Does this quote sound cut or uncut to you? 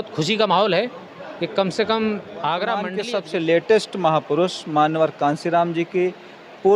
cut